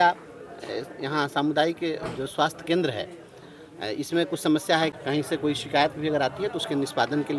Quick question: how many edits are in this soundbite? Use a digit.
1